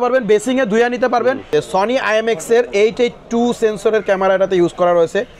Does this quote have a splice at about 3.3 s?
no; 1 cut; at 1.5 s

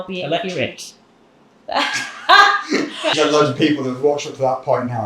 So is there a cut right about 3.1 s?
yes; 1 cut; at 3.1 s

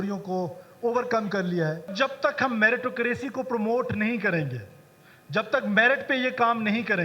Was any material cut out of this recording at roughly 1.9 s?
yes; 1 cut; at 1.9 s

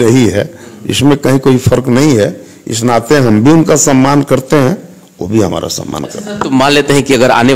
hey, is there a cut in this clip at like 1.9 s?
no; 0 cuts

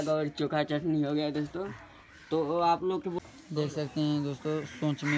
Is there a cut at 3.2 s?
yes; 1 cut; at 3.2 s

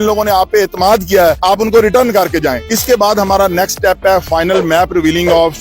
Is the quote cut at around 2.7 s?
yes; 1 cut; at 2.7 s

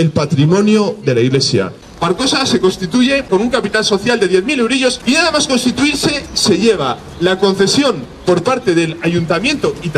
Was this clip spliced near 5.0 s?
yes; 3 cuts; at 1.8 s, 3.3 s, 5.0 s

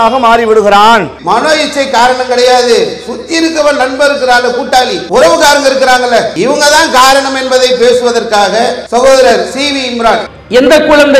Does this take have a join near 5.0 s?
yes; 5 cuts; at 1.1 s, 5.0 s, 6.3 s, 8.8 s, 10.3 s

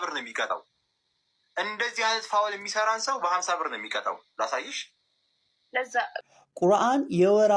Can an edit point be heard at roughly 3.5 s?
no; 1 cut; at 6.2 s

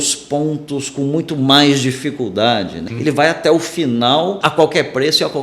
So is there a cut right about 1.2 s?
no; 2 cuts; at 2.8 s, 4.4 s

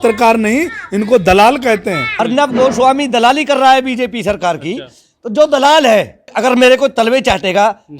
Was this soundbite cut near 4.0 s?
no; 2 cuts; at 2.0 s, 6.3 s

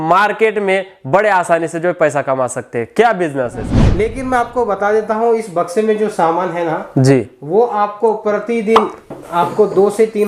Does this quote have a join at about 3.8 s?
yes; 1 cut; at 3.8 s

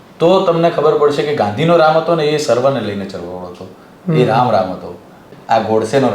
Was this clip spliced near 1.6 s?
no; 1 cut; at 5.3 s

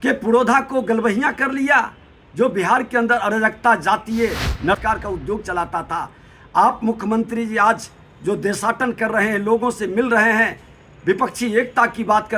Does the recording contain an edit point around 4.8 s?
yes; 1 cut; at 4.8 s

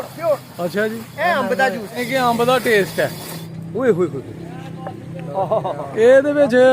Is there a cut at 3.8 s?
no; 1 cut; at 1.9 s

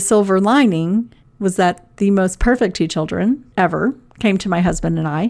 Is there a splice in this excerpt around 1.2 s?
yes; 2 cuts; at 1.2 s, 3.5 s

